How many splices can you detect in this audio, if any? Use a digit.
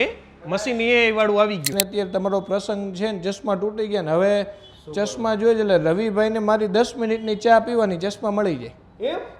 1